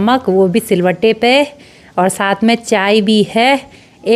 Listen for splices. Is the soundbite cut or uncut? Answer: uncut